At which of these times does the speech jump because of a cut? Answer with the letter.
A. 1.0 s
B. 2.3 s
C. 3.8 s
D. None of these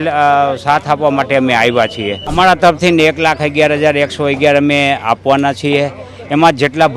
B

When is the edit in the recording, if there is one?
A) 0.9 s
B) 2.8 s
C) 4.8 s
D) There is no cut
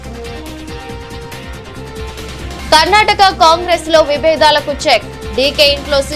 D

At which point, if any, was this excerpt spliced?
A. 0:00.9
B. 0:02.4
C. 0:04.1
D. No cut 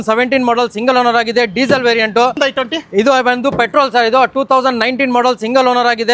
B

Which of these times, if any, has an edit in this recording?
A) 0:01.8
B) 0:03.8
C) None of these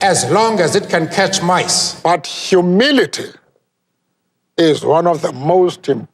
A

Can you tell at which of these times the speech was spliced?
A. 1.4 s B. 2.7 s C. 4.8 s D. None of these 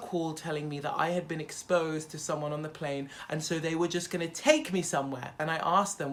D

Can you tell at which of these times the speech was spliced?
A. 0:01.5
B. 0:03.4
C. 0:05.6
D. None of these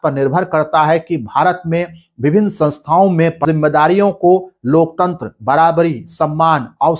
B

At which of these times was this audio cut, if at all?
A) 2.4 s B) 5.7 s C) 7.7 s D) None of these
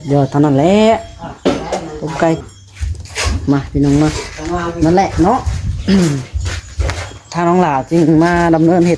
A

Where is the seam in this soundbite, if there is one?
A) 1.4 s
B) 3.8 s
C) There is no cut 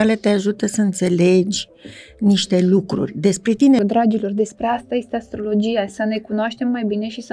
B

